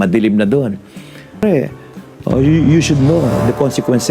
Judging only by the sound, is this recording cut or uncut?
cut